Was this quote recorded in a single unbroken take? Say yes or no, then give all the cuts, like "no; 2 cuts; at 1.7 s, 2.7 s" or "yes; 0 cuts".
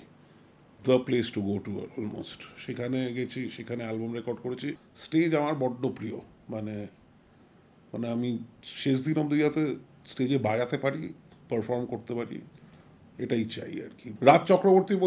no; 2 cuts; at 4.9 s, 14.1 s